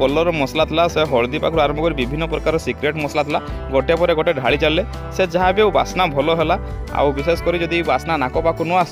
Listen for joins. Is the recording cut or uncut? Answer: uncut